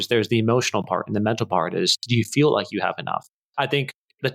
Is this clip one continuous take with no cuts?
no; 1 cut; at 3.4 s

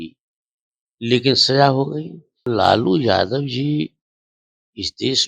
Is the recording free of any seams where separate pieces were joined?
no; 1 cut; at 2.5 s

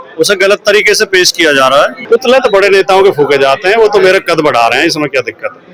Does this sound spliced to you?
yes; 1 cut; at 2.0 s

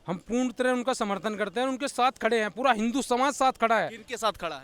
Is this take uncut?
yes; 0 cuts

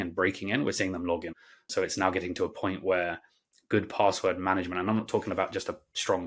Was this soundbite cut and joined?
yes; 1 cut; at 1.6 s

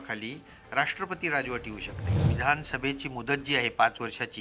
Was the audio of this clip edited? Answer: yes; 1 cut; at 2.2 s

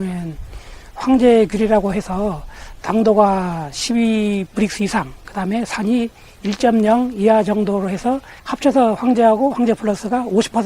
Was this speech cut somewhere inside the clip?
yes; 1 cut; at 8.4 s

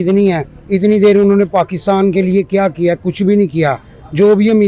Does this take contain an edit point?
no; 0 cuts

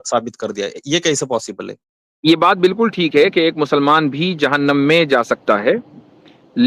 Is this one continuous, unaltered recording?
yes; 0 cuts

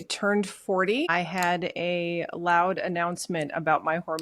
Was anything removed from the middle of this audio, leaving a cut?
yes; 1 cut; at 1.1 s

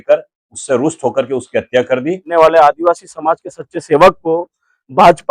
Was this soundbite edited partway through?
yes; 1 cut; at 2.3 s

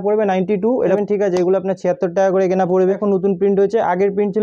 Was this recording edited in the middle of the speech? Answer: yes; 2 cuts; at 1.0 s, 3.0 s

